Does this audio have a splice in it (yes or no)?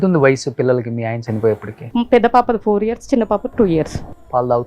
yes